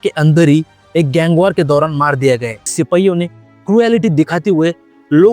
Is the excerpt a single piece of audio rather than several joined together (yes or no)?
no